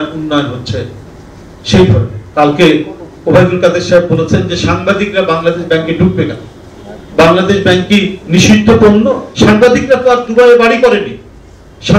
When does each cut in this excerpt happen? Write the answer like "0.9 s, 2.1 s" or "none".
2.2 s, 9.2 s

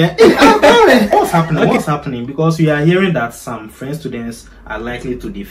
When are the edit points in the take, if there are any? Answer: 1.1 s

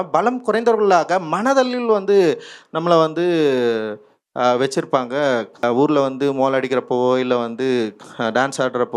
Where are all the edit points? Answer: 5.5 s

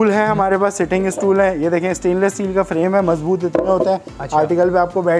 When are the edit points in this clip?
none

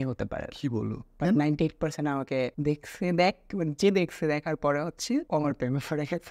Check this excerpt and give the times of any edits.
2.6 s, 5.3 s

